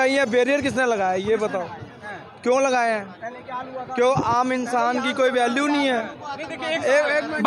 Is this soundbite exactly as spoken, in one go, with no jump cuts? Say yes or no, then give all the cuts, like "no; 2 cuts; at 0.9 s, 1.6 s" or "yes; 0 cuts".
yes; 0 cuts